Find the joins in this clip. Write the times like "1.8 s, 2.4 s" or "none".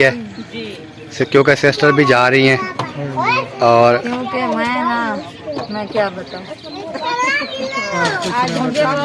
none